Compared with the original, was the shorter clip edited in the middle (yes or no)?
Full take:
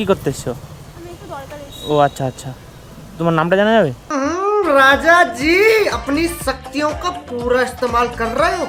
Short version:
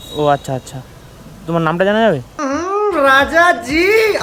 no